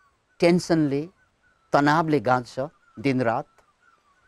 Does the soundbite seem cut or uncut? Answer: uncut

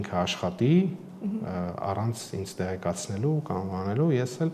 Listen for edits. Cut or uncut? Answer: uncut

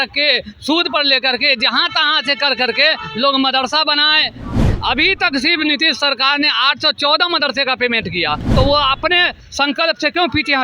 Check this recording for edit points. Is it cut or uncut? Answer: cut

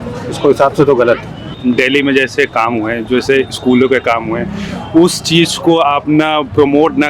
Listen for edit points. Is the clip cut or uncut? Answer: cut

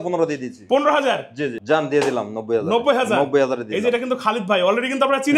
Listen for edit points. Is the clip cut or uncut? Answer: cut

